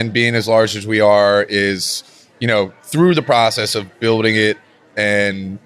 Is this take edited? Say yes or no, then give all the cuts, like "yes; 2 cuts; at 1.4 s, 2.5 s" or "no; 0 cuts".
no; 0 cuts